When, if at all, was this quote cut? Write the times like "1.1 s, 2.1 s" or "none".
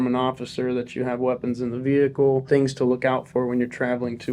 2.4 s